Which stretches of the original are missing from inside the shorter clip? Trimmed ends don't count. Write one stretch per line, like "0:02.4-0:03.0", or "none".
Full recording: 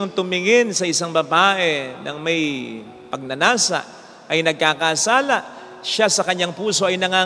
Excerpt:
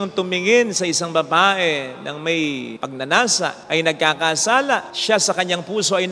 0:02.8-0:03.1
0:03.9-0:04.2
0:05.5-0:05.8